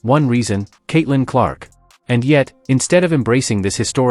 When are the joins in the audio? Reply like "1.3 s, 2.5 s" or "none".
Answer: 2.1 s

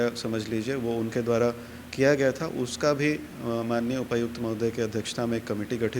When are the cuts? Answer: none

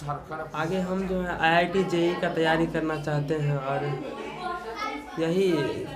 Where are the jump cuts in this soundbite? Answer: none

